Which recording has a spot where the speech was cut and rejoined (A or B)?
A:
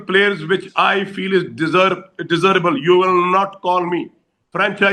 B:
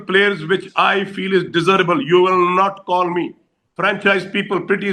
B